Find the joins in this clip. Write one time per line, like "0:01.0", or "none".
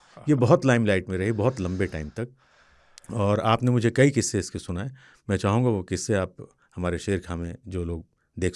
none